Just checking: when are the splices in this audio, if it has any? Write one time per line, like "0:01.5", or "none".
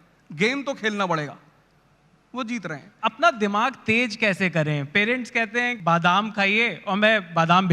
0:02.9
0:05.7

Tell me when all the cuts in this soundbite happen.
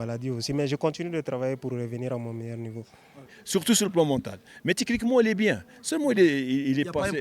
0:03.3

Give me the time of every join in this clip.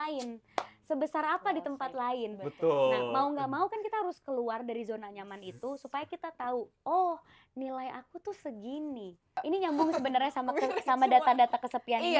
0:09.4

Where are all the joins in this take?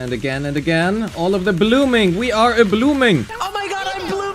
0:03.3

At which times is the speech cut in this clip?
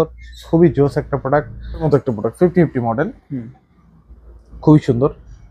0:01.9

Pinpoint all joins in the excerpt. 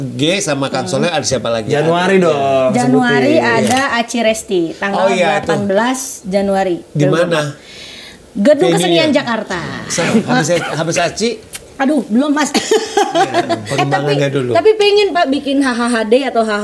0:10.1
0:13.6

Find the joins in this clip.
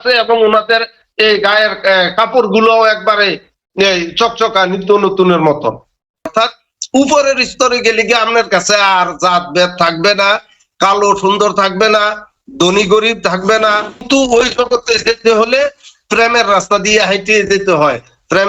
0:06.3
0:14.0

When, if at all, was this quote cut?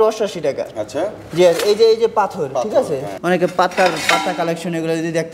0:03.1

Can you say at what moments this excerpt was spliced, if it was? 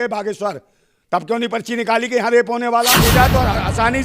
0:03.0

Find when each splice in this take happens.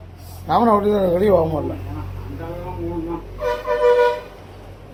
none

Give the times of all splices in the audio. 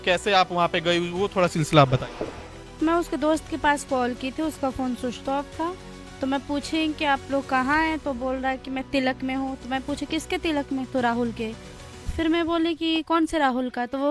none

